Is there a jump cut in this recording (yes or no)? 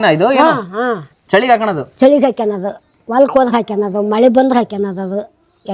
no